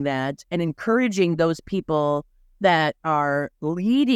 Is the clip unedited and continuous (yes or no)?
yes